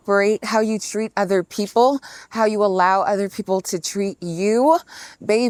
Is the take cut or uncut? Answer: uncut